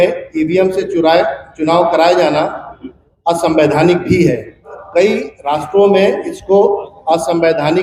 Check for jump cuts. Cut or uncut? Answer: cut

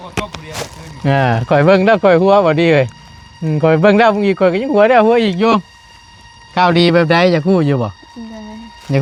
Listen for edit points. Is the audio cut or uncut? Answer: uncut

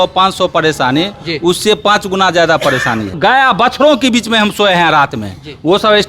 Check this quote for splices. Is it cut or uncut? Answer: cut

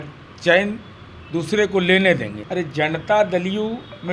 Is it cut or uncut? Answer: cut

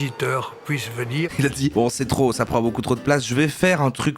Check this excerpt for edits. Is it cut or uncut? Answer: cut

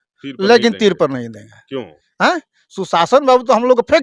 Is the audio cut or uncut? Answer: uncut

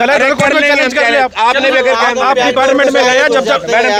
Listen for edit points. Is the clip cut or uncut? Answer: uncut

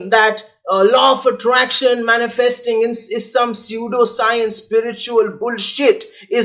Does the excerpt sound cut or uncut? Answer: uncut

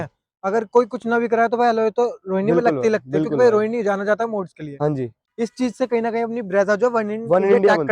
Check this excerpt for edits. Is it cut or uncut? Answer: cut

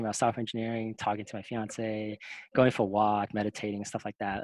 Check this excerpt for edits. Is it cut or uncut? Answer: uncut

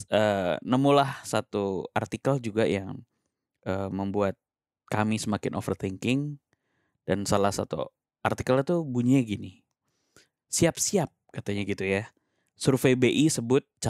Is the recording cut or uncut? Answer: uncut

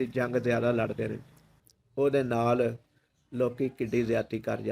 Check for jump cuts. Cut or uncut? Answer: cut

